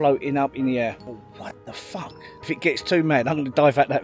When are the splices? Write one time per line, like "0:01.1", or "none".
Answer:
0:01.0
0:02.4